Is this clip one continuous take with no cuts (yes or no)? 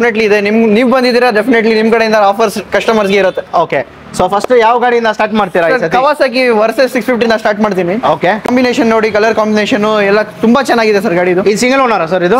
no